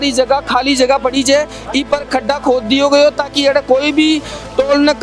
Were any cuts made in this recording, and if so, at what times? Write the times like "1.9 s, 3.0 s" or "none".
none